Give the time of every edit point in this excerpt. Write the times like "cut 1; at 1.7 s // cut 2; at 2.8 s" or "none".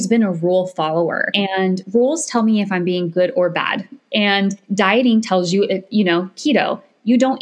cut 1; at 1.8 s // cut 2; at 4.6 s